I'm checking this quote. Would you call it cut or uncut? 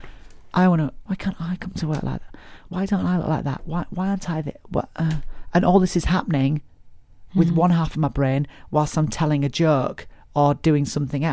cut